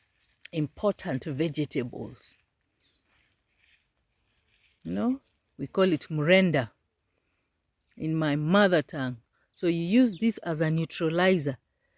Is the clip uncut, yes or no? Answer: yes